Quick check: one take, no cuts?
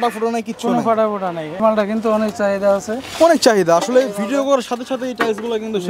no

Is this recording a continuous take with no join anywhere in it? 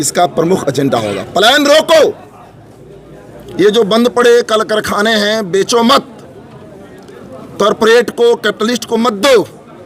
yes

